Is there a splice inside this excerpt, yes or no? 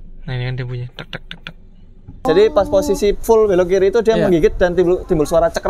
yes